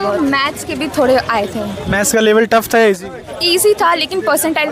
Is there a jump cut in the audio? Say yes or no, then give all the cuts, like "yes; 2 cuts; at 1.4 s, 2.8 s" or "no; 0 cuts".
no; 0 cuts